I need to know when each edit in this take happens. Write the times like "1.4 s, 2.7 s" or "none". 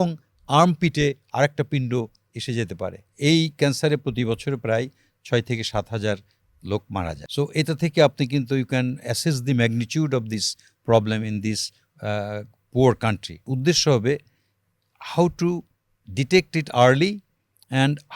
3.0 s, 7.2 s, 13.5 s